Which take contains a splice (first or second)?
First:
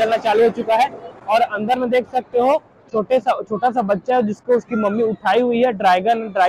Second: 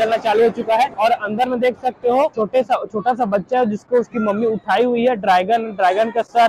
second